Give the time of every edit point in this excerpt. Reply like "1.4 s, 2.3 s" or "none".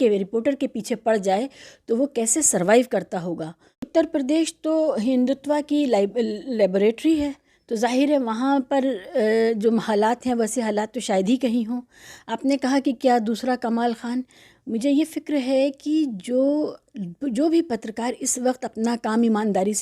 3.8 s